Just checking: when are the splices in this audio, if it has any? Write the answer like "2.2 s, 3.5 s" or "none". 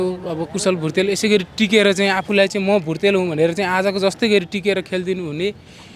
none